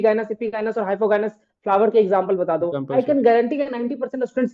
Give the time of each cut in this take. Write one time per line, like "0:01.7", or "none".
none